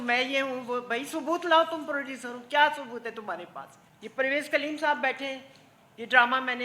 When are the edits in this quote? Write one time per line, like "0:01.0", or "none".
0:04.1